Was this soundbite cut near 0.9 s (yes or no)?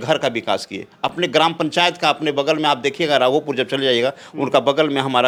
no